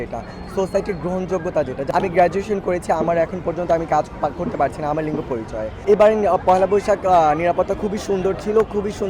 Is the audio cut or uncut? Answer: cut